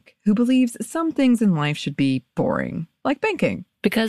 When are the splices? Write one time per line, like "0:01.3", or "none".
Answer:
none